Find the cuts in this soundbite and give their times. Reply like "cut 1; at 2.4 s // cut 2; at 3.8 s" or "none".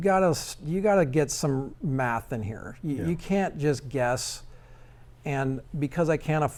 none